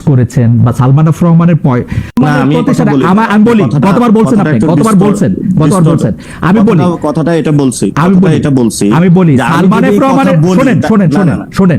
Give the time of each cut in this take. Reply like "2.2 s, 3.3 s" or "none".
2.2 s